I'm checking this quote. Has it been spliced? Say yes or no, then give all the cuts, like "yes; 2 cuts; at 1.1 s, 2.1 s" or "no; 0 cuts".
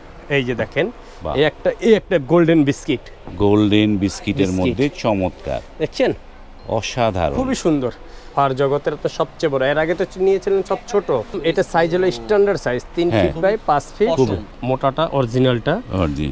yes; 3 cuts; at 8.3 s, 11.4 s, 14.4 s